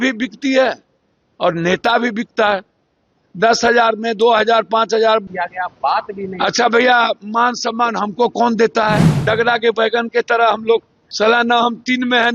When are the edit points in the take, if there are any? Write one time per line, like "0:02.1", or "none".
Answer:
0:05.3
0:09.1
0:11.0